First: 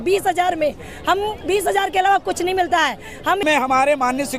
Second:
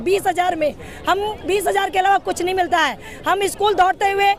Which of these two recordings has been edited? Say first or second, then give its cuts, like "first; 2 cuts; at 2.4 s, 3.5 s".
first; 1 cut; at 3.4 s